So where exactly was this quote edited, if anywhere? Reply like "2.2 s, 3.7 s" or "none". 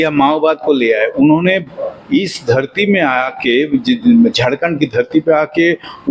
none